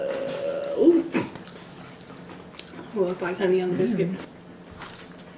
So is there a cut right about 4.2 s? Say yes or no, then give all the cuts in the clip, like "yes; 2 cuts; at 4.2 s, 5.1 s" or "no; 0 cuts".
yes; 1 cut; at 4.2 s